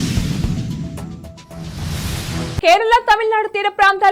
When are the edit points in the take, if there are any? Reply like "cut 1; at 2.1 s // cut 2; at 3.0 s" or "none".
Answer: none